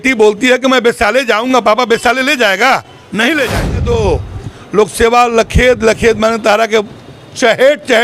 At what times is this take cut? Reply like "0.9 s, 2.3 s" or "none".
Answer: 3.8 s